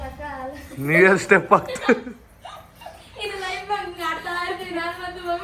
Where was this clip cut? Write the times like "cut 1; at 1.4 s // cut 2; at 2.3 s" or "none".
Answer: none